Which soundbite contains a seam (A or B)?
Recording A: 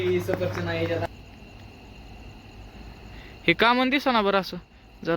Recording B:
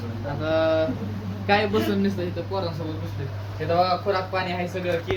A